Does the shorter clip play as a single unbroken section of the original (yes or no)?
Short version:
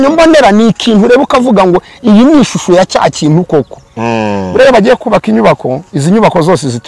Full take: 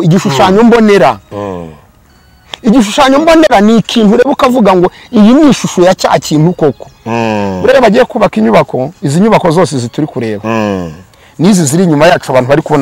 yes